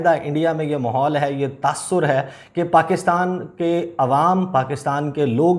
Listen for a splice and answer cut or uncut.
uncut